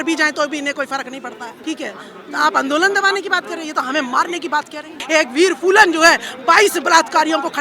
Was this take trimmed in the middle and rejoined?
yes; 2 cuts; at 1.5 s, 5.0 s

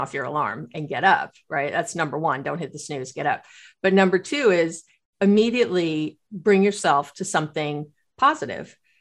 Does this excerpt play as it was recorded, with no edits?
yes; 0 cuts

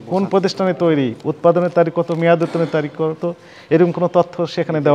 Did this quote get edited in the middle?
no; 0 cuts

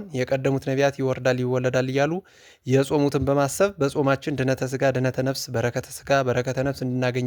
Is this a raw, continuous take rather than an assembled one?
yes; 0 cuts

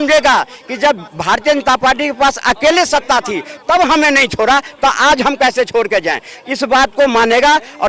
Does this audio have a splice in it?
no; 0 cuts

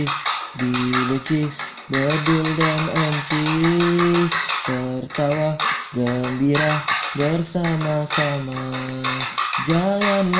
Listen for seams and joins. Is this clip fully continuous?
yes; 0 cuts

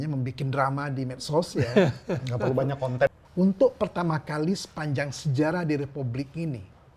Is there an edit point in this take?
yes; 1 cut; at 3.1 s

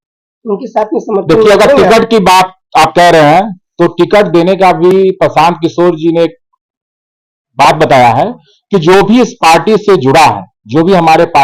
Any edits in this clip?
no; 0 cuts

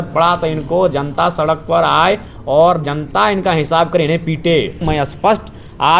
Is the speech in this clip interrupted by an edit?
yes; 1 cut; at 4.8 s

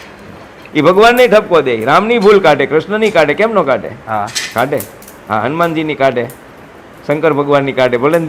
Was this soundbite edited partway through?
no; 0 cuts

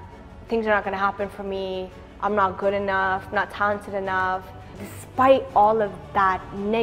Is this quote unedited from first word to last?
no; 1 cut; at 4.9 s

